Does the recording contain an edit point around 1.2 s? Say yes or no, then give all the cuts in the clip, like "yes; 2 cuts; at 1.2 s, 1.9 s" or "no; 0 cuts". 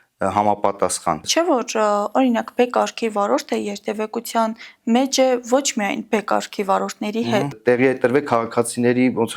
yes; 2 cuts; at 1.2 s, 7.5 s